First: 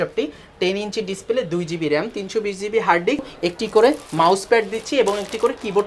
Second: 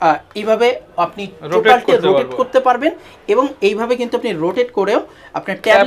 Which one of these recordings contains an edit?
first; 1 cut; at 3.3 s

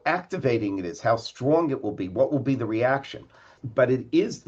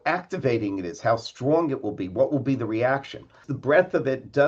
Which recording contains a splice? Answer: second; 1 cut; at 3.5 s

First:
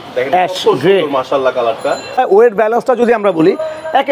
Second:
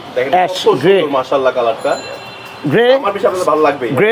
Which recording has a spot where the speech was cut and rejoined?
first; 1 cut; at 2.2 s

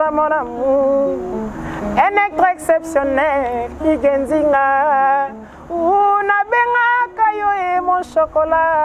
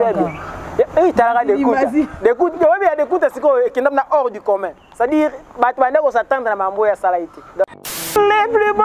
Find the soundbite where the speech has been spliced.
second; 1 cut; at 7.7 s

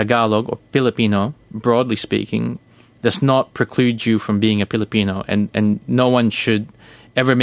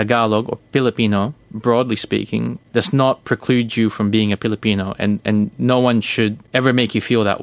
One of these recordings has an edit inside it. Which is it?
second; 2 cuts; at 2.6 s, 6.4 s

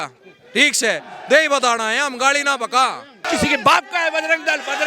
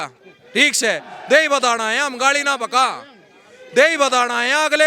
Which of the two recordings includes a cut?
first; 1 cut; at 3.2 s

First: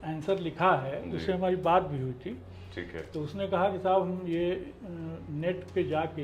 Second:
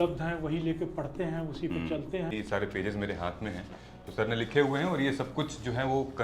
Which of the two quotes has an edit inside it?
second; 1 cut; at 2.3 s

